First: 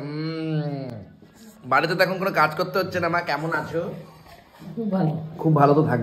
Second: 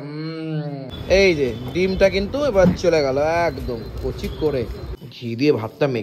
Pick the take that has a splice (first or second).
second